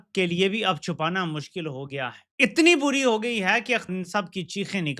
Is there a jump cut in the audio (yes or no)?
yes